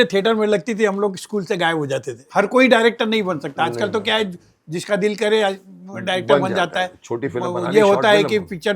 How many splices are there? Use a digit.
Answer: 1